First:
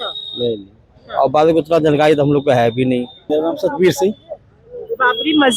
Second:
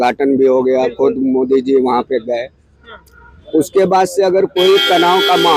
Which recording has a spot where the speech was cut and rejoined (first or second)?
first